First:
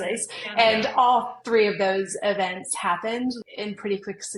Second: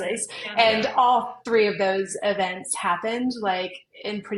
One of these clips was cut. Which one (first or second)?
first